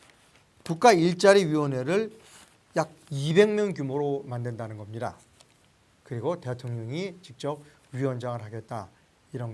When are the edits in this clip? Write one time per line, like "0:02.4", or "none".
0:06.5